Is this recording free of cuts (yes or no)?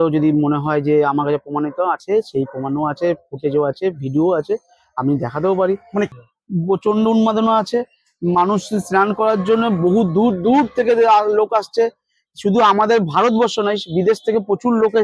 no